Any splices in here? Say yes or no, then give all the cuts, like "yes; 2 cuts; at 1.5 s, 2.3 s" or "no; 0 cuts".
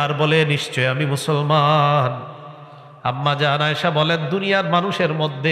no; 0 cuts